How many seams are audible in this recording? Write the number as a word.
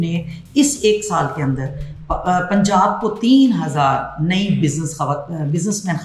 zero